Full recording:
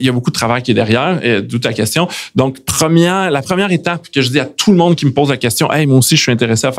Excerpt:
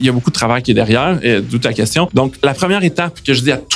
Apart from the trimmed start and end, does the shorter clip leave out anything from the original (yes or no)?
yes